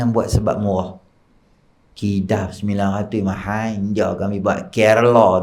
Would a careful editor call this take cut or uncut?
uncut